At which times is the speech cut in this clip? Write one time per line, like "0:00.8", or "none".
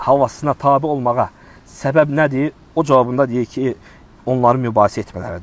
none